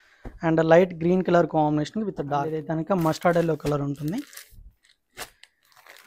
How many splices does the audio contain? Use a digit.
1